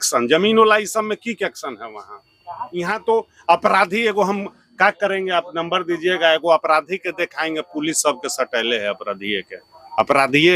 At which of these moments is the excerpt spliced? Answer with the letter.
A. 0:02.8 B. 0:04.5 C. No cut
A